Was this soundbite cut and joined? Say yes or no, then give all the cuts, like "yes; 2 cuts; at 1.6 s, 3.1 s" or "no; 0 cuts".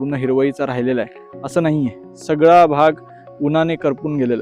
no; 0 cuts